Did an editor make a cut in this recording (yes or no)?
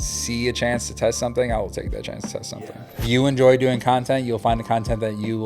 yes